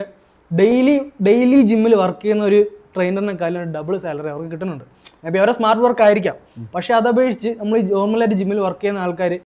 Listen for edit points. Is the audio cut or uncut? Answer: uncut